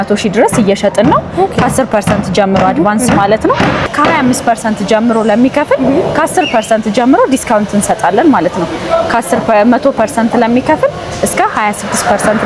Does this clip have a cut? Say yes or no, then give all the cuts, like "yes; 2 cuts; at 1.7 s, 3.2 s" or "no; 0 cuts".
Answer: yes; 1 cut; at 3.9 s